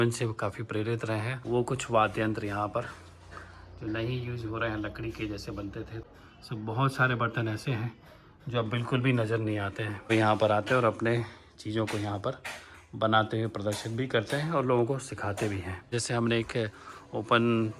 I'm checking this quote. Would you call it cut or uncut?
cut